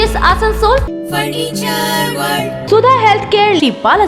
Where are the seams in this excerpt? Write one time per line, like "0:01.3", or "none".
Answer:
0:00.8
0:02.6